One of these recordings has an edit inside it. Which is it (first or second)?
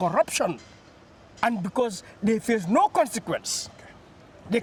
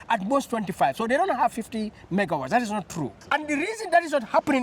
second